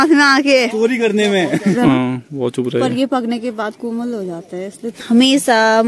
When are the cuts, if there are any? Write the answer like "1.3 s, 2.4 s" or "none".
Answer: 1.8 s, 4.9 s